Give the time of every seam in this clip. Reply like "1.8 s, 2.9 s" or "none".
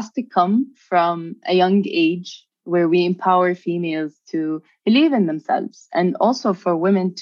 none